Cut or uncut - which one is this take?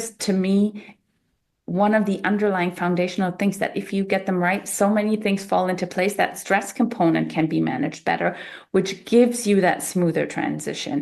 uncut